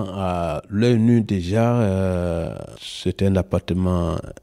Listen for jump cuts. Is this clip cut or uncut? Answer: uncut